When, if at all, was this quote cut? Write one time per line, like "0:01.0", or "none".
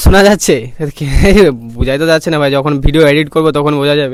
none